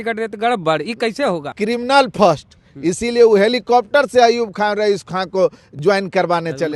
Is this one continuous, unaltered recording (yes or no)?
no